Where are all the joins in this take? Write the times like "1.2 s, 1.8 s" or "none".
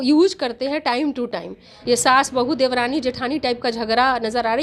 1.7 s